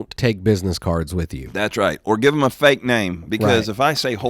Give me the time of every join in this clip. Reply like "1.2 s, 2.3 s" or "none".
1.4 s